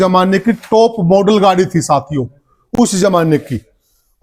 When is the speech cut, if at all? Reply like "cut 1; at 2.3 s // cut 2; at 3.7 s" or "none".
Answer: none